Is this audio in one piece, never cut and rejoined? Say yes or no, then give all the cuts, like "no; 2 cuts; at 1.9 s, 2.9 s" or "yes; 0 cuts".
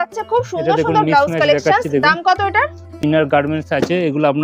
no; 1 cut; at 3.0 s